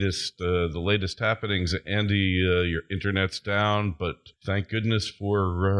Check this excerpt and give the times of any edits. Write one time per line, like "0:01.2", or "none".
0:03.0